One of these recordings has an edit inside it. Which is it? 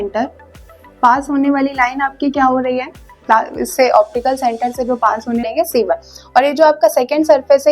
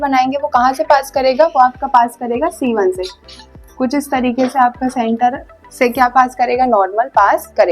first; 1 cut; at 5.5 s

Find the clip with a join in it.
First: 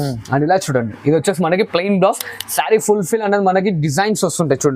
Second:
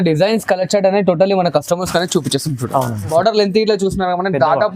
second; 1 cut; at 3.1 s

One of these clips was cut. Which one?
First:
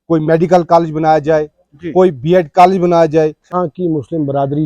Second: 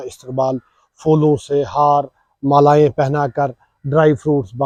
first; 1 cut; at 3.5 s

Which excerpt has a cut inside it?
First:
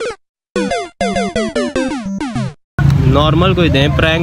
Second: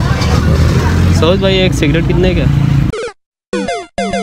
first; 1 cut; at 2.8 s

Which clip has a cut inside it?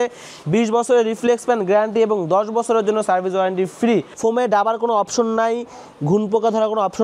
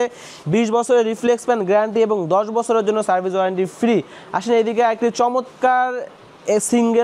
first; 1 cut; at 4.1 s

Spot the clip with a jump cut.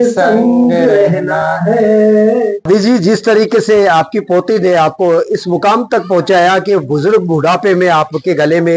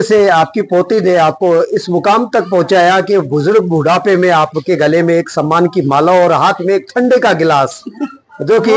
first; 1 cut; at 2.7 s

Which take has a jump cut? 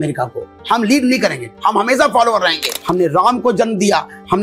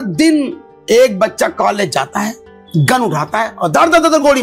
first; 1 cut; at 2.8 s

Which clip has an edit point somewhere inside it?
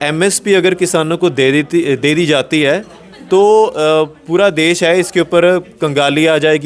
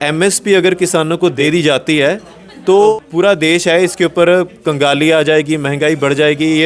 second; 2 cuts; at 1.4 s, 2.9 s

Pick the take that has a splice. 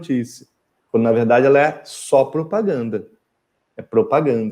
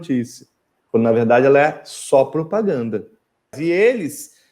second; 1 cut; at 3.6 s

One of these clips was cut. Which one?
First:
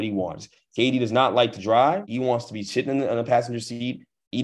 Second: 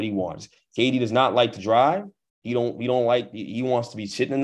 first; 1 cut; at 2.1 s

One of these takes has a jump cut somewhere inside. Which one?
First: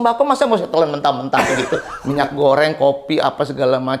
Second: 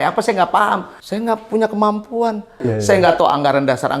second; 2 cuts; at 1.0 s, 2.8 s

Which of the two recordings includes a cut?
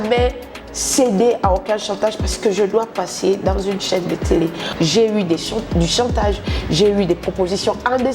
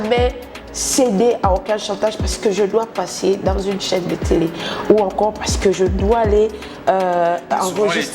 first; 1 cut; at 4.6 s

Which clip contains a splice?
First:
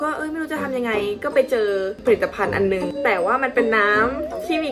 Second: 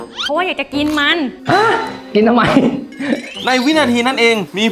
second; 1 cut; at 3.3 s

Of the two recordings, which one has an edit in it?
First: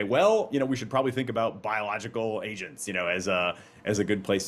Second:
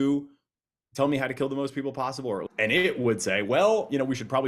second; 1 cut; at 2.5 s

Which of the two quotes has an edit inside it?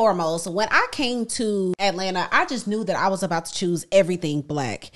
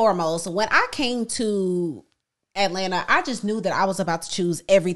first; 1 cut; at 1.7 s

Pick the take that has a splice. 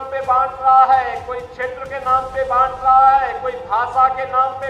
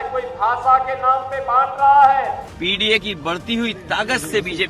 second; 1 cut; at 2.5 s

